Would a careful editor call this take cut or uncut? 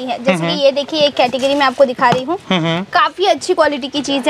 uncut